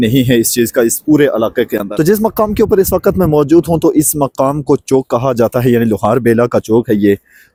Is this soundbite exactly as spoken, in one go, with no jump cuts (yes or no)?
yes